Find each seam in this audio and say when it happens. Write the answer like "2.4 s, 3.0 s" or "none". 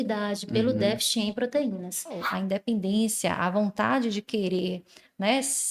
2.3 s